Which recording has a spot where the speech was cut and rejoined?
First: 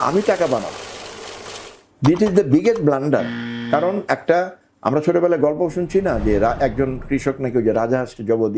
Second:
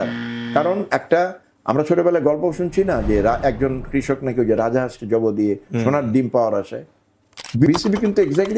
second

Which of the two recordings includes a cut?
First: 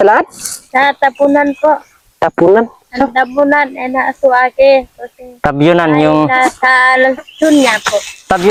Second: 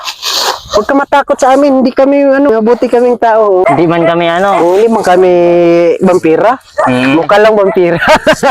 second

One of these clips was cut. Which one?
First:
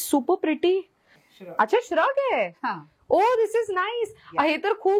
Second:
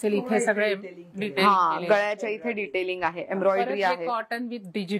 first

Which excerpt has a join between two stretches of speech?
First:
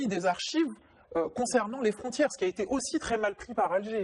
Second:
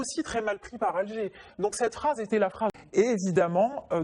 second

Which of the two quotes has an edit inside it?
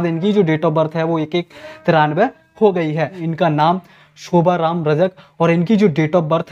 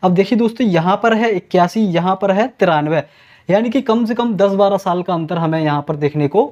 first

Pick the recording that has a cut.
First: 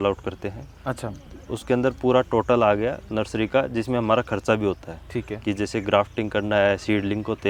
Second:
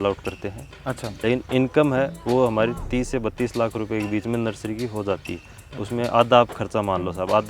second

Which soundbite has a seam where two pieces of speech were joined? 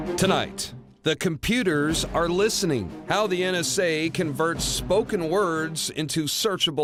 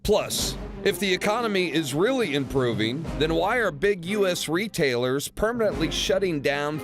second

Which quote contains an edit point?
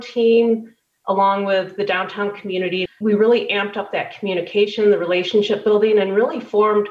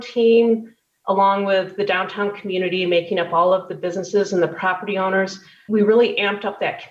first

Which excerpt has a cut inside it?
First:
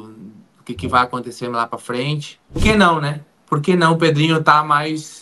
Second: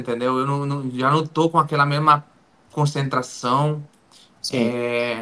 first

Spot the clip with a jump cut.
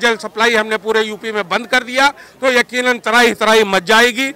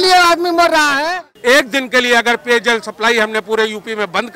second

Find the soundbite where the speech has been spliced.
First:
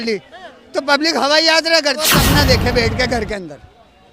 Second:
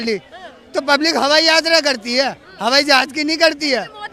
first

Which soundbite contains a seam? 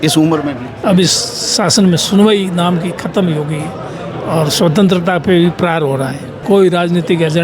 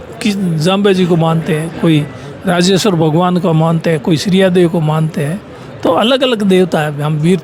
first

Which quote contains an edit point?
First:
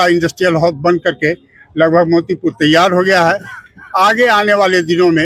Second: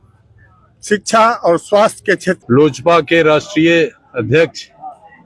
second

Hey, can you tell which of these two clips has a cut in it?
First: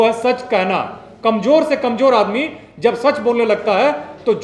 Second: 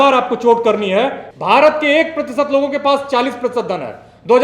second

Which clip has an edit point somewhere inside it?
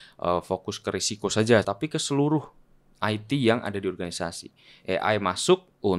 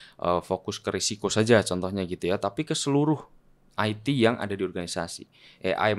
first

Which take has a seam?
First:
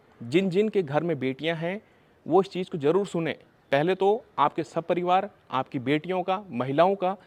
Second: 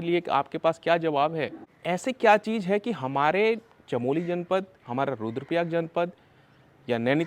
second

